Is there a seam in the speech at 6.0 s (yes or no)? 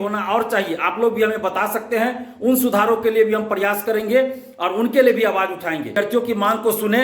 yes